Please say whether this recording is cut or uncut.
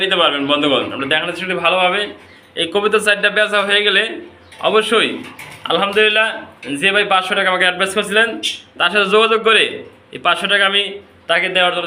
uncut